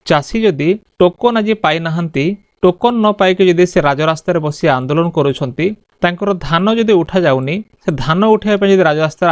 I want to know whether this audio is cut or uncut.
uncut